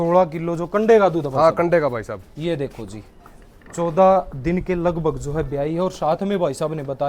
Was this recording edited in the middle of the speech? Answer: no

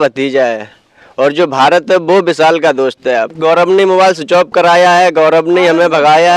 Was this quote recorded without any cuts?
no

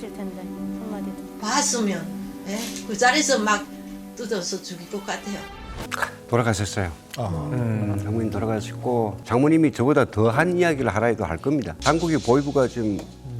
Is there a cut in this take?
yes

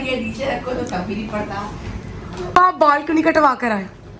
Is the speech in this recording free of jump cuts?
yes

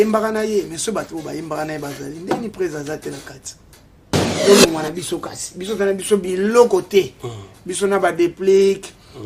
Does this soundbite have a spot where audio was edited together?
yes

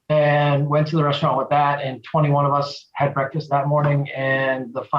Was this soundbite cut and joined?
yes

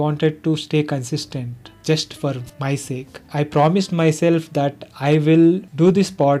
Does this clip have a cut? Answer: yes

